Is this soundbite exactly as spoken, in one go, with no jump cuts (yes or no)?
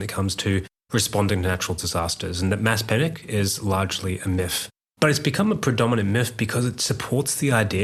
yes